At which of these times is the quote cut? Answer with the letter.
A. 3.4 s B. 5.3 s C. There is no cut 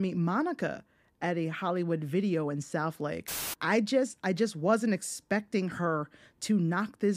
A